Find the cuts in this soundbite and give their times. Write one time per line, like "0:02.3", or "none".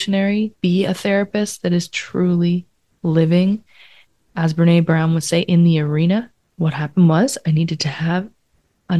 0:06.4